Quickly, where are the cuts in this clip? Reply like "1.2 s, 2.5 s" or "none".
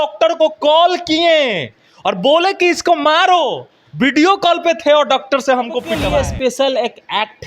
6.0 s